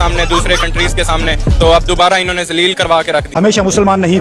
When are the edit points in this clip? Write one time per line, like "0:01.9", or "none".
0:03.3